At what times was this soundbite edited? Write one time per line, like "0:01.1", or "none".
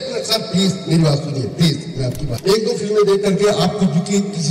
0:02.2

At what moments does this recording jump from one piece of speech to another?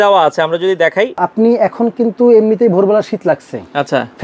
0:01.2

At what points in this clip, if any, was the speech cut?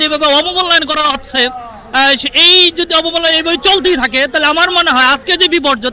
none

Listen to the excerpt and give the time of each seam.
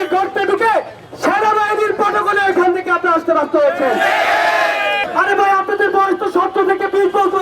0:05.0

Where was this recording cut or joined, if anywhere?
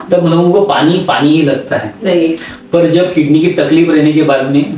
none

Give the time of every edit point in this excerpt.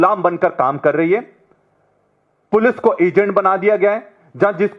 none

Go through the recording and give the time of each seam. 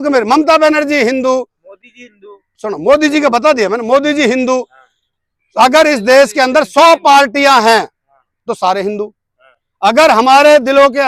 none

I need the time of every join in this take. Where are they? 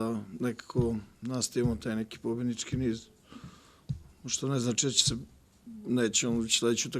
0:03.4

